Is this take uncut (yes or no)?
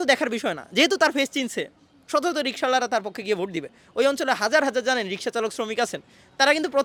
yes